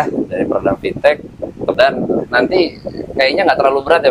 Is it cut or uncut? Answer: cut